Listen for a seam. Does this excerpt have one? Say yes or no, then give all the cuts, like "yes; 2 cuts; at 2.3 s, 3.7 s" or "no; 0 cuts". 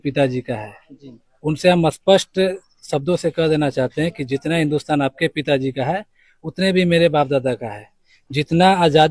no; 0 cuts